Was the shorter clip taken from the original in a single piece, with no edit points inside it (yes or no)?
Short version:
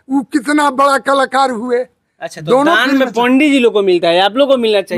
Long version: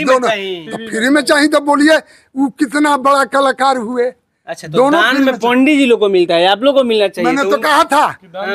yes